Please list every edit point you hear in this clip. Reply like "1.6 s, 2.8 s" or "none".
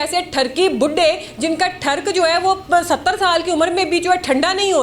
none